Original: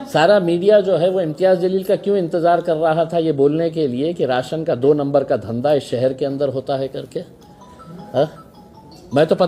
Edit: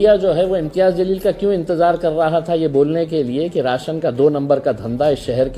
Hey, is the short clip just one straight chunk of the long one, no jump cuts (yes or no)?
yes